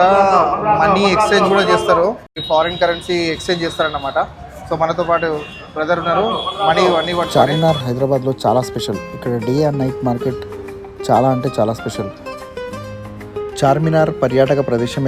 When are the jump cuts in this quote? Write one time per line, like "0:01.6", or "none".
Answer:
0:02.3
0:07.3

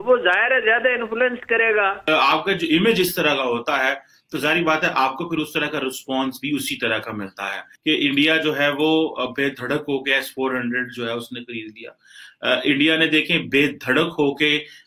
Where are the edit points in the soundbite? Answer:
0:02.0
0:07.7

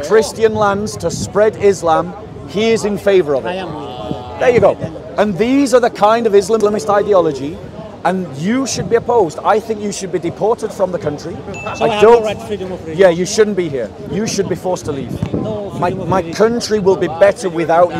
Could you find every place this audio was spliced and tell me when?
0:06.6

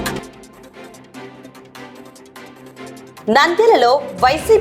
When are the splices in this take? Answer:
0:02.7

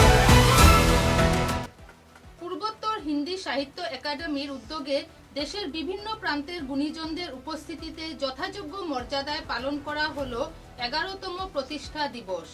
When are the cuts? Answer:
0:01.5

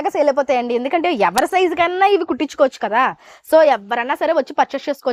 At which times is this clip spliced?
none

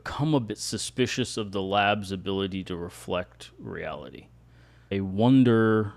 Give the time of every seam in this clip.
0:04.9

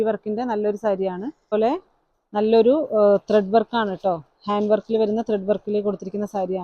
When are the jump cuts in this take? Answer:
0:01.5

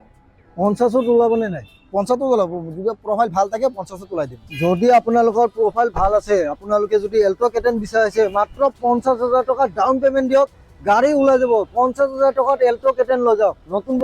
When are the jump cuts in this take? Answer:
none

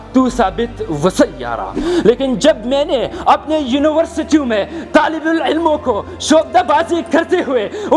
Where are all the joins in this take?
0:01.8

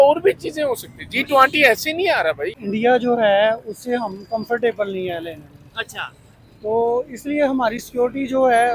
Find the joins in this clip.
0:02.6

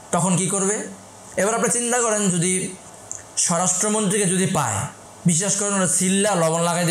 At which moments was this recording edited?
none

